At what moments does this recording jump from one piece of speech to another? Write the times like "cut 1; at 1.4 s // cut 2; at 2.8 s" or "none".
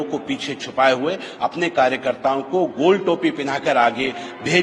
none

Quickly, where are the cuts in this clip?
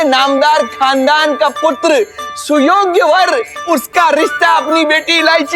cut 1; at 3.5 s

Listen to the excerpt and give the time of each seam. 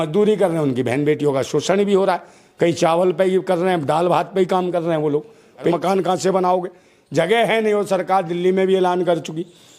cut 1; at 5.7 s

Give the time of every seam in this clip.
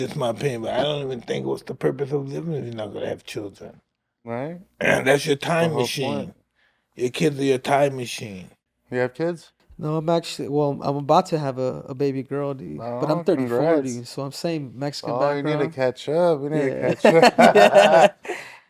cut 1; at 4.7 s

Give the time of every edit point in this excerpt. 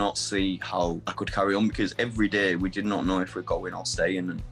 cut 1; at 1.1 s

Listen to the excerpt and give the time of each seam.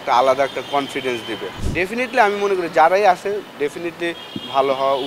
cut 1; at 1.5 s

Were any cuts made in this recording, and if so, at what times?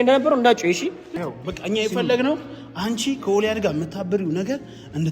cut 1; at 1.0 s

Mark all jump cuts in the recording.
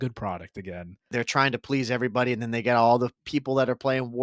cut 1; at 1.1 s

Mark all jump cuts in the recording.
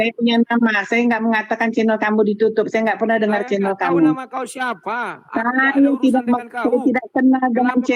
none

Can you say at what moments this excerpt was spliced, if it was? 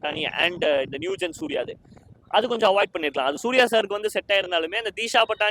none

